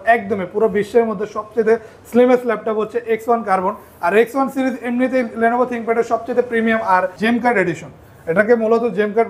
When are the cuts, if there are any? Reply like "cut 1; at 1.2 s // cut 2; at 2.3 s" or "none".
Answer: cut 1; at 7.2 s